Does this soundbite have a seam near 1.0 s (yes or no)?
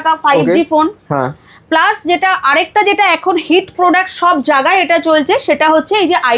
no